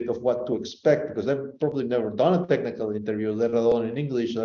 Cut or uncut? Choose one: uncut